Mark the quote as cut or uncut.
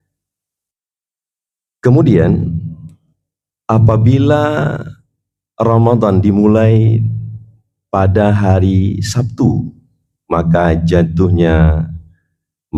uncut